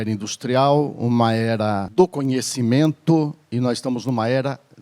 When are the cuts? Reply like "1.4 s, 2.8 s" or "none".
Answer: 1.8 s